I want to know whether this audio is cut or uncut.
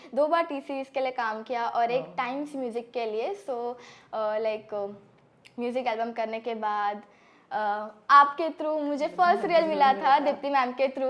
uncut